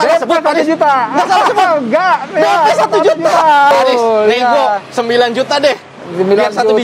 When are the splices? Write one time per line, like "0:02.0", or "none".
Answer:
0:03.7